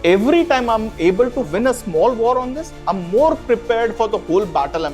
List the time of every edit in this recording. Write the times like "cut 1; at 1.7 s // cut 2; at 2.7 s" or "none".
cut 1; at 1.5 s